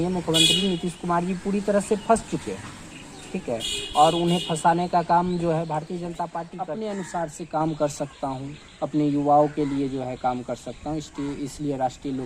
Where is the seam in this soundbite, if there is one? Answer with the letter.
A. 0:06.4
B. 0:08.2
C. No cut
A